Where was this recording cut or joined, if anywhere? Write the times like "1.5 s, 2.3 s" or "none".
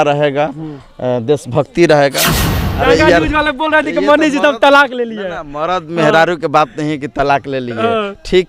2.5 s